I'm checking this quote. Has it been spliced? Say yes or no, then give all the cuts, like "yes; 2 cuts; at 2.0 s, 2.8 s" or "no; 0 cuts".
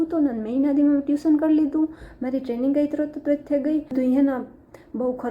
yes; 1 cut; at 3.9 s